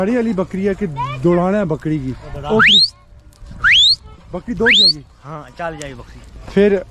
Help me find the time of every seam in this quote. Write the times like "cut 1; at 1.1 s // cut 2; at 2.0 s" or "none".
none